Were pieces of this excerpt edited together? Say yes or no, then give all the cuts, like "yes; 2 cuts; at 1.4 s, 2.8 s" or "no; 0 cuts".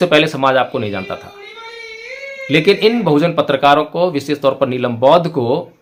no; 0 cuts